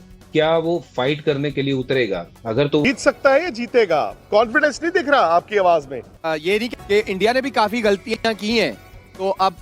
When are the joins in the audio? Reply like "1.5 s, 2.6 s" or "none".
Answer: 2.8 s, 6.7 s